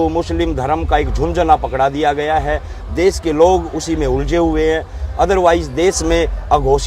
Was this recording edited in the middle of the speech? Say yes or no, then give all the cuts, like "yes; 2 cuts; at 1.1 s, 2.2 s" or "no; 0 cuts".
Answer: no; 0 cuts